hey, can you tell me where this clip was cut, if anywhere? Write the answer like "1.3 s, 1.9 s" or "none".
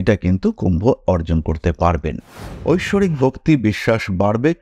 2.4 s